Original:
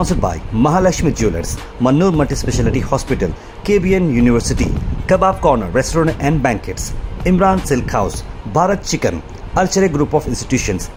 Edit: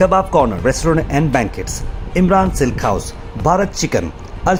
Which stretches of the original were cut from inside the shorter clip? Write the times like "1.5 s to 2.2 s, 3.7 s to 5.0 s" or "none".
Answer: none